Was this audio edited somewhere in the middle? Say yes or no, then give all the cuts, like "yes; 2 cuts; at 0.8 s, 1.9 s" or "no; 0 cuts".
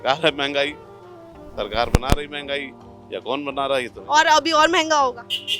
no; 0 cuts